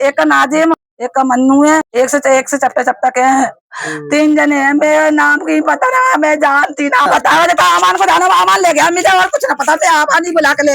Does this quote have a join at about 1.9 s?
yes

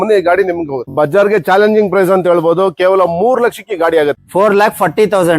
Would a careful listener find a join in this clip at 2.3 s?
no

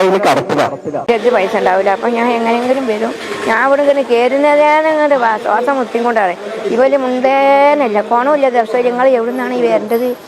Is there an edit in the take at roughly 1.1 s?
yes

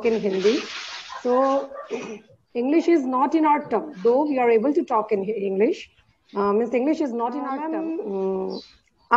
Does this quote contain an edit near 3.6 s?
no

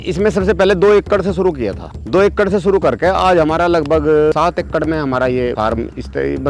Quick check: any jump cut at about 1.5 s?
no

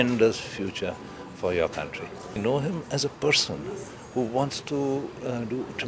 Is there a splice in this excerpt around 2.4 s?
yes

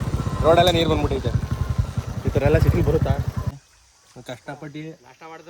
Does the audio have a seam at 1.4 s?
no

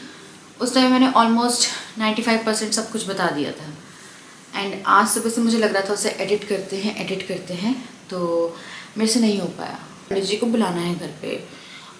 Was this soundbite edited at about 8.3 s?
no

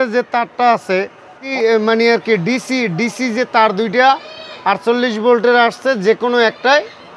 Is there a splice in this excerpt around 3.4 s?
no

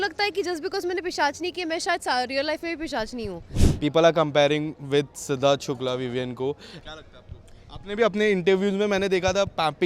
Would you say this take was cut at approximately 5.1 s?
no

